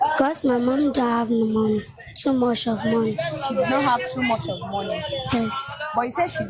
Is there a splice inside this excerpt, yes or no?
no